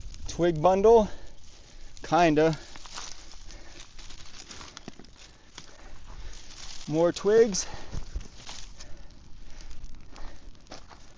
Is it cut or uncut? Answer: uncut